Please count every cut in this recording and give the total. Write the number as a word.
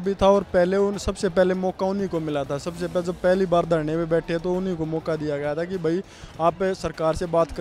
zero